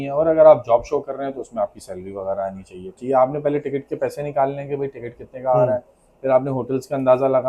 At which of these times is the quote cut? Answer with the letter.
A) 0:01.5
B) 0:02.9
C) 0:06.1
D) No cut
B